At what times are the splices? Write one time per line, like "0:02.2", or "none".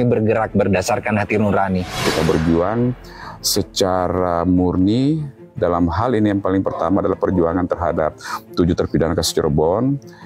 0:02.0